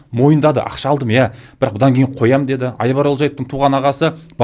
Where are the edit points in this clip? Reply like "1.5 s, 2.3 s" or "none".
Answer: none